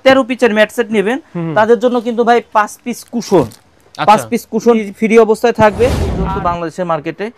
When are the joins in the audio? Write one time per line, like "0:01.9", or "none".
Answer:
0:04.8
0:06.1